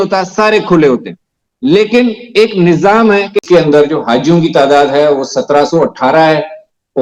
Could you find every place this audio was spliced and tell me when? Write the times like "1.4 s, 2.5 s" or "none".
3.4 s